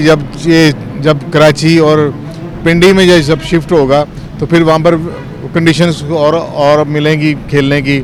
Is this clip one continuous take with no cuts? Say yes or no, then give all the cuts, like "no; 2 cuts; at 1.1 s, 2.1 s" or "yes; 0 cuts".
yes; 0 cuts